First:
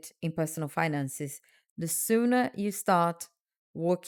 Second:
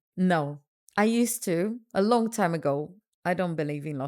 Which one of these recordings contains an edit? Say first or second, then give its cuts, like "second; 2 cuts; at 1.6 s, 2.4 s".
second; 1 cut; at 3.0 s